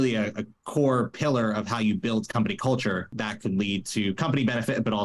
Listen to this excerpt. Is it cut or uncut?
cut